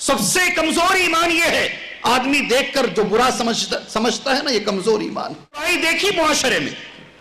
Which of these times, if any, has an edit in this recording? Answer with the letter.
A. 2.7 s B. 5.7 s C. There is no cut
B